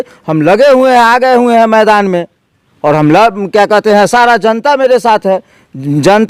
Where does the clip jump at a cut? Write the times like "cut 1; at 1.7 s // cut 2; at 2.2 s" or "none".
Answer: none